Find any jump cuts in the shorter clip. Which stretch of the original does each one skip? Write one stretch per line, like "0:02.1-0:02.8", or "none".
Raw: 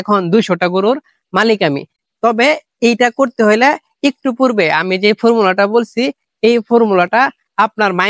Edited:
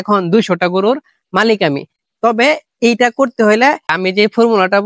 0:03.9-0:04.8